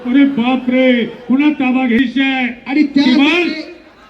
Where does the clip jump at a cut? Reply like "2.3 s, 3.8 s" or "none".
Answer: 2.0 s